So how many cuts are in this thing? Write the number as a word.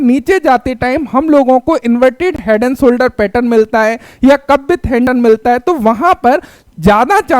one